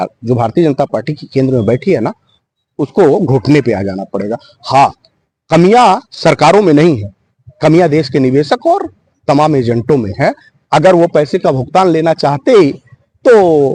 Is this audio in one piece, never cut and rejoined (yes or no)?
yes